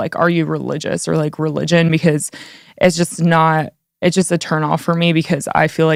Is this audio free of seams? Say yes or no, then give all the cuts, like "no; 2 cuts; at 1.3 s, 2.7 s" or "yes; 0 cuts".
yes; 0 cuts